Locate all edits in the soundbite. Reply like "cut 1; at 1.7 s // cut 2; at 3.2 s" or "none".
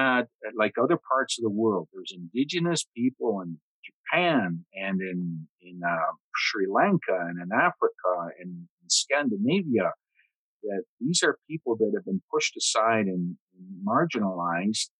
none